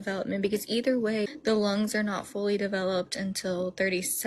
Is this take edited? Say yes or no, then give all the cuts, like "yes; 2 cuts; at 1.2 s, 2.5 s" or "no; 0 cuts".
yes; 1 cut; at 1.3 s